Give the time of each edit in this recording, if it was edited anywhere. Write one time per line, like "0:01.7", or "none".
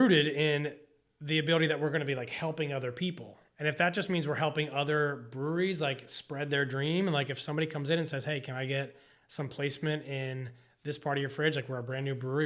none